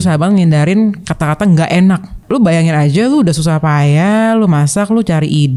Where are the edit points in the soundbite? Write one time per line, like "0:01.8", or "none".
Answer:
0:02.2